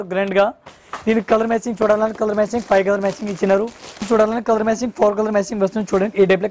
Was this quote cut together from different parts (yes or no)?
yes